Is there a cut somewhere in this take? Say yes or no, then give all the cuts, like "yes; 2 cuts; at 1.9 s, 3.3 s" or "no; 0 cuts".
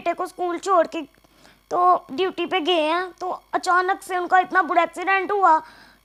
no; 0 cuts